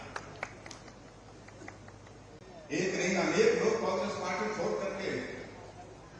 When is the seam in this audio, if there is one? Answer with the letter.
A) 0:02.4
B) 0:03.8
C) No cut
A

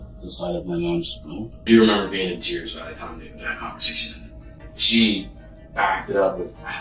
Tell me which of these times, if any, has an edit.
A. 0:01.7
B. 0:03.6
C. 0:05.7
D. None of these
A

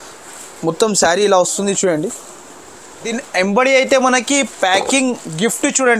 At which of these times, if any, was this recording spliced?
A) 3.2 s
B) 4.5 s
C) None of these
A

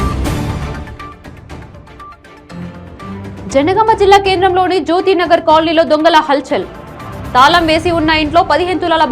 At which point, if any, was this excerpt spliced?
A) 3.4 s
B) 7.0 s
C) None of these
A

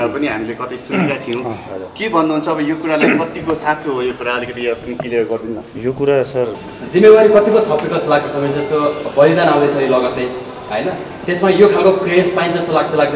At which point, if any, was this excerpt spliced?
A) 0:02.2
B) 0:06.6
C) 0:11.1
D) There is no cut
B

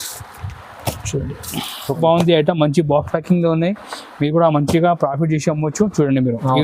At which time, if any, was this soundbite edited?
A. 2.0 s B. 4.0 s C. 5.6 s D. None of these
A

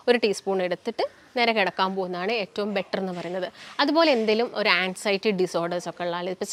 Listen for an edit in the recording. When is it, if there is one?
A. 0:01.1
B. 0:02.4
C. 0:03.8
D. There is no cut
D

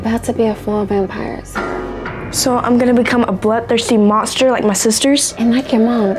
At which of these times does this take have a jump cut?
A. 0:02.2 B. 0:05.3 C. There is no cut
B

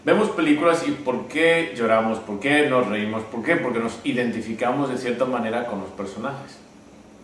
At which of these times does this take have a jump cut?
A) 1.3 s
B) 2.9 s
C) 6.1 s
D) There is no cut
A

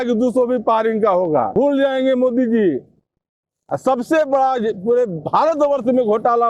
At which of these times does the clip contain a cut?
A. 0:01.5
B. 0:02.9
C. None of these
A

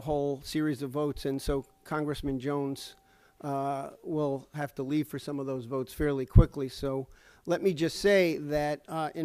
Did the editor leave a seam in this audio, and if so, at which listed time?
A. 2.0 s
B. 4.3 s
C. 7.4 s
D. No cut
D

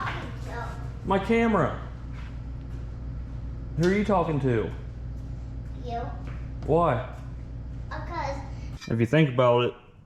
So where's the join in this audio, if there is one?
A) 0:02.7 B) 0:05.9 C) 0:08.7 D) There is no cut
C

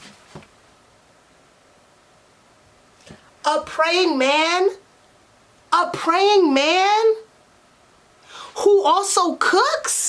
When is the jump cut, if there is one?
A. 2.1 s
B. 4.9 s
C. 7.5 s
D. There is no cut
D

